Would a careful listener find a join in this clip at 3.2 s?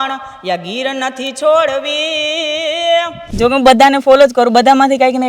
yes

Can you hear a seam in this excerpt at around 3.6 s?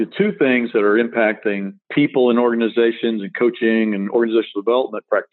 no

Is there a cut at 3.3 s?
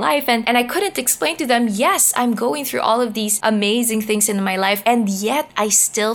yes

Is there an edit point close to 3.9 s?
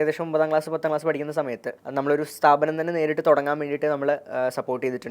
no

